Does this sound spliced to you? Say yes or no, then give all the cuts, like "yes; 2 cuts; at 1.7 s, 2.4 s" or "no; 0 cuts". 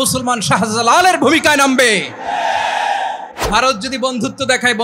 yes; 1 cut; at 3.3 s